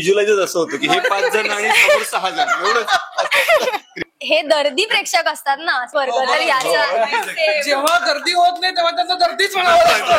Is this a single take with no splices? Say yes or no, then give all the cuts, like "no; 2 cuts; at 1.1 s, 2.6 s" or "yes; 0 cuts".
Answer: no; 2 cuts; at 4.0 s, 5.9 s